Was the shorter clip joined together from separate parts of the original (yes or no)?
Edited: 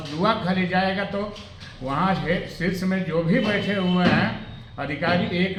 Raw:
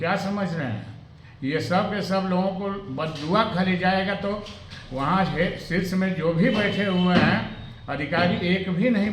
no